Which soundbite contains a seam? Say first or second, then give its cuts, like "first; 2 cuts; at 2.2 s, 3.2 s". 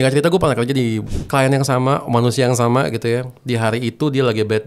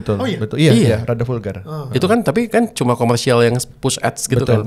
first; 1 cut; at 1.1 s